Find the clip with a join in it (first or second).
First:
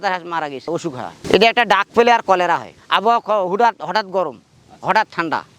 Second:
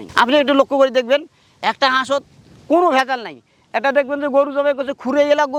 first